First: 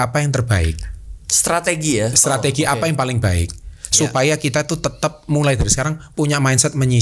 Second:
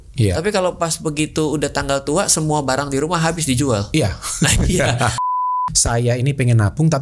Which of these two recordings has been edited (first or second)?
second